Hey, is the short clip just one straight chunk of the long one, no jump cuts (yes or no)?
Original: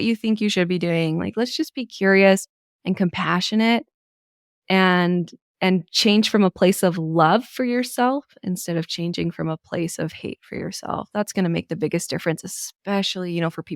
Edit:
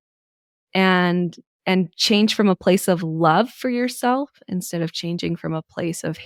yes